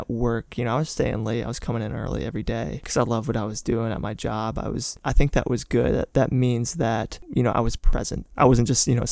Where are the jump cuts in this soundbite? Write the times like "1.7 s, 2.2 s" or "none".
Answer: 5.0 s, 7.2 s, 8.2 s